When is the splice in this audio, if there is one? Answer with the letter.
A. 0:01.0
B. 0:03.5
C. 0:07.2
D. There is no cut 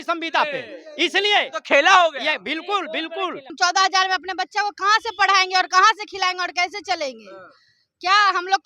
B